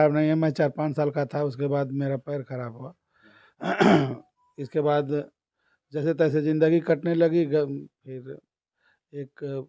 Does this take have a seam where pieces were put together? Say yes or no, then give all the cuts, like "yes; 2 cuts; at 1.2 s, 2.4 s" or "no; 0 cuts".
no; 0 cuts